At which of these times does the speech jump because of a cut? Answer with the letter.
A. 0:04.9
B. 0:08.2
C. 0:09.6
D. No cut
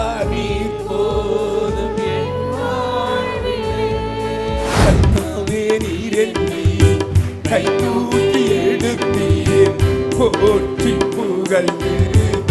A